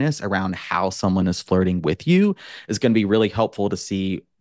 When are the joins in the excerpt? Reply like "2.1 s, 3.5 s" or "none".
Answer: none